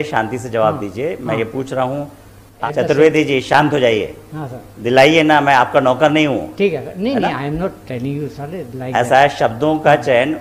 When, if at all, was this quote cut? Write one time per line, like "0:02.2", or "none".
0:02.5